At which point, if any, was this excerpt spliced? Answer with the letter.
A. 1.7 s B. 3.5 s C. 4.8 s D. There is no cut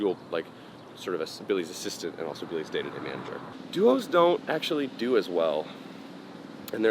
B